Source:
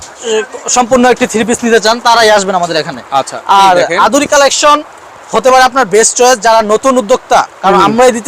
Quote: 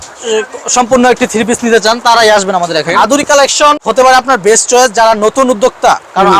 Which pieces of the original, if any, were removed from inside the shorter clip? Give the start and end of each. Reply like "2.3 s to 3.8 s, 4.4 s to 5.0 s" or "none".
2.9 s to 3.9 s, 4.8 s to 5.3 s